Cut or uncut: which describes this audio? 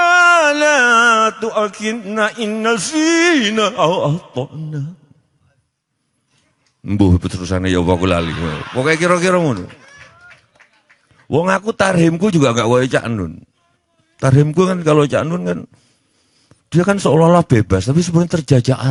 uncut